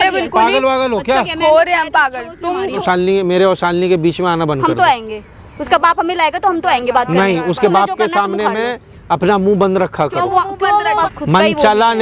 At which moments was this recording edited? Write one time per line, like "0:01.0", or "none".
0:02.8
0:11.0